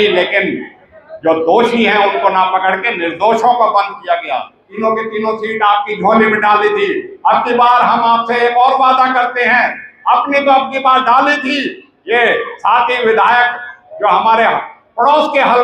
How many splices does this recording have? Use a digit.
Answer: 1